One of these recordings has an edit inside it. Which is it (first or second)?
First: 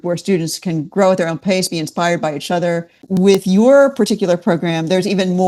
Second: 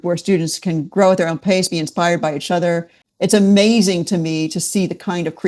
first